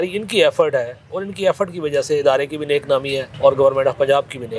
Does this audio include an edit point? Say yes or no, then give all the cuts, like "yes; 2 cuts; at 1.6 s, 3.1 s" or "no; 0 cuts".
yes; 1 cut; at 3.3 s